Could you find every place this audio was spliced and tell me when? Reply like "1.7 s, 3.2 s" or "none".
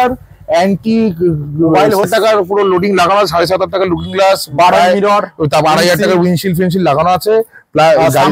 2.0 s